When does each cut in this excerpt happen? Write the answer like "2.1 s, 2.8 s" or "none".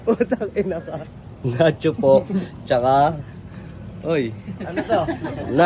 1.0 s